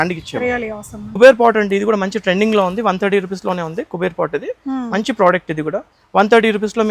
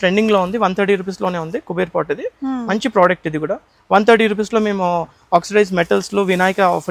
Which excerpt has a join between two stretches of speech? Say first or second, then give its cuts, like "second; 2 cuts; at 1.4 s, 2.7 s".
first; 1 cut; at 1.2 s